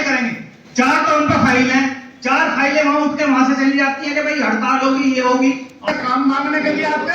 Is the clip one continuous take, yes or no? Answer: no